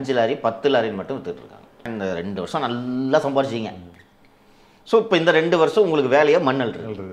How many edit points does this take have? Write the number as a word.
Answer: one